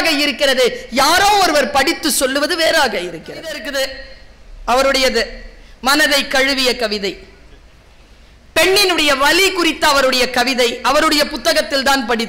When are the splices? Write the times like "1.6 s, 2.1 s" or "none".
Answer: 3.6 s